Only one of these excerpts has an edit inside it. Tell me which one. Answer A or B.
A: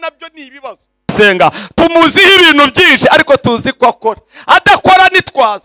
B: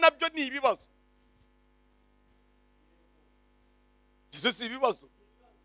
A